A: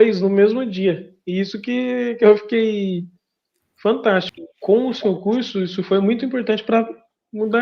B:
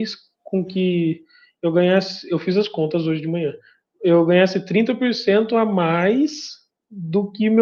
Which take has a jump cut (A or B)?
A